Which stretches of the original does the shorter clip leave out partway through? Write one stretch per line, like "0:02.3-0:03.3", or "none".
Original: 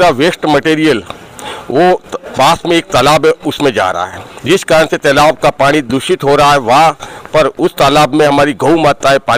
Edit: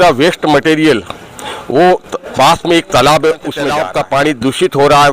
0:03.8-0:05.3